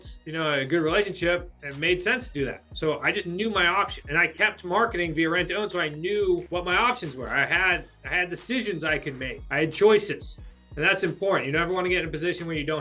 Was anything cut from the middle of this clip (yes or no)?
yes